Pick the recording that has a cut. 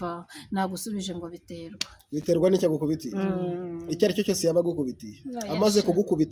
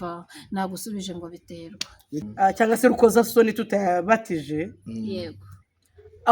second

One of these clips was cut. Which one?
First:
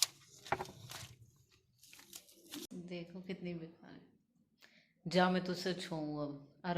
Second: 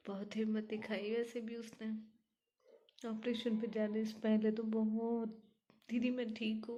first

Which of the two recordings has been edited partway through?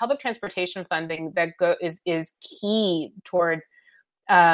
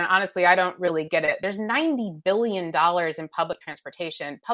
second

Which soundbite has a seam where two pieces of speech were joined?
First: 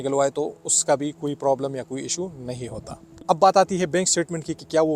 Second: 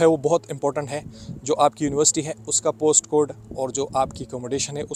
first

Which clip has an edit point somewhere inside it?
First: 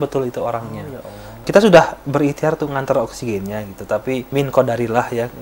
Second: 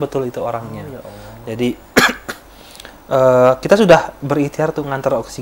first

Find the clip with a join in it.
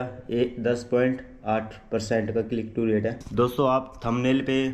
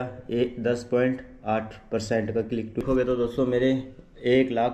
second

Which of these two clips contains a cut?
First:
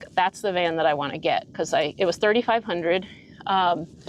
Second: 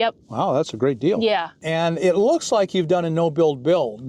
second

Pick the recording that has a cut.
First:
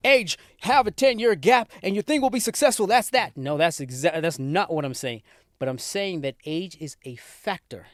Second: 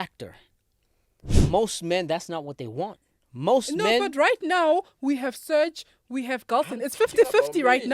second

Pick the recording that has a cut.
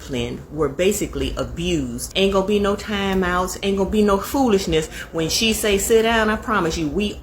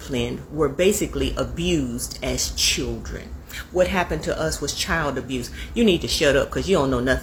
first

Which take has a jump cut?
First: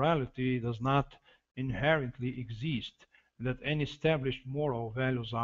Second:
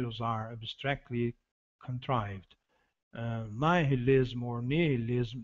first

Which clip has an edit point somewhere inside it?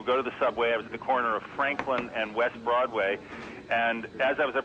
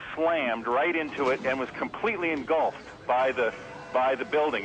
first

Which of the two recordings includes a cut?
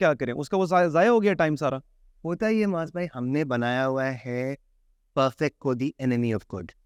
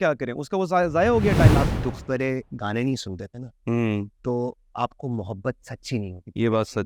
second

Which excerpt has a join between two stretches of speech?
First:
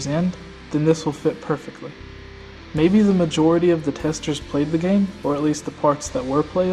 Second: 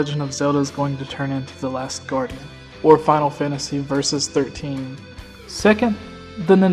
second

